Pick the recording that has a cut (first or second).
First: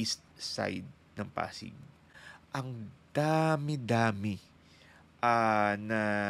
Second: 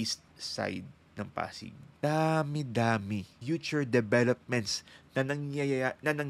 second